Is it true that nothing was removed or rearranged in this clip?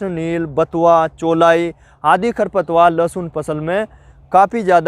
yes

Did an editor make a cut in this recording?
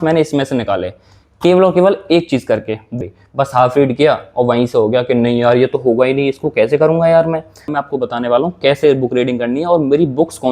yes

